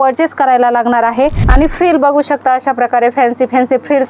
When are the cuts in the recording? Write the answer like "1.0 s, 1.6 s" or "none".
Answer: 1.4 s